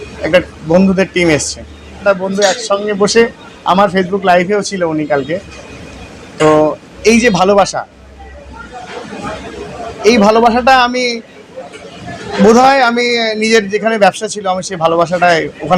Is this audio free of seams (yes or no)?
no